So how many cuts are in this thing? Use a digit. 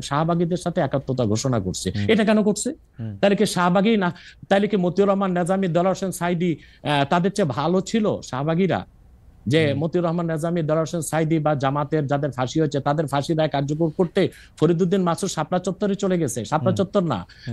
0